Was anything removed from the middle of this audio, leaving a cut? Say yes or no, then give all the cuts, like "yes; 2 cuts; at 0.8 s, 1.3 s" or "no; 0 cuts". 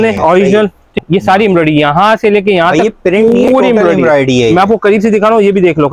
yes; 1 cut; at 1.0 s